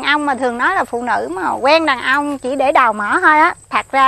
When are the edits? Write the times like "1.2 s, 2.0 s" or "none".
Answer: none